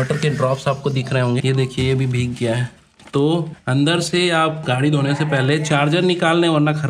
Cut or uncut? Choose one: cut